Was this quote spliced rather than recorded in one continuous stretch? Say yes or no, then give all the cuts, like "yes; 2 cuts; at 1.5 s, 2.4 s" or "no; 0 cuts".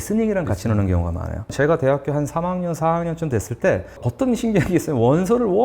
yes; 2 cuts; at 1.5 s, 4.0 s